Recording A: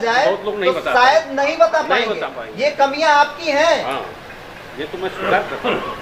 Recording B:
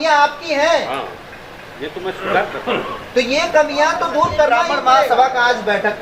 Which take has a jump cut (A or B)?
B